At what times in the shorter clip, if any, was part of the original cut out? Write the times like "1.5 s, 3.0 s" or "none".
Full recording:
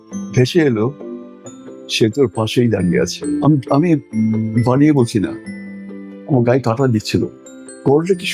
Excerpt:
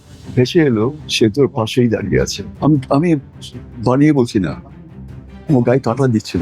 1.0 s